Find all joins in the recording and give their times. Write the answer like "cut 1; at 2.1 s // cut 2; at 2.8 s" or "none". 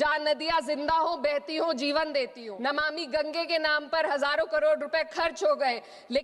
cut 1; at 2.4 s